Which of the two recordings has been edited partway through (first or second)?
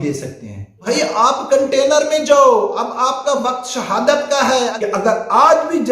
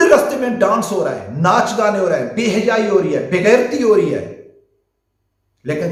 first